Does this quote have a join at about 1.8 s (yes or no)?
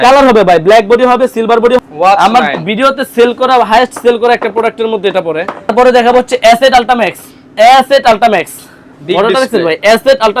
yes